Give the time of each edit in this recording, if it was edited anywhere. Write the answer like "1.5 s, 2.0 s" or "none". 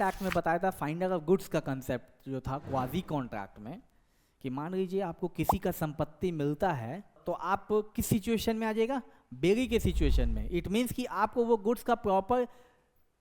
7.2 s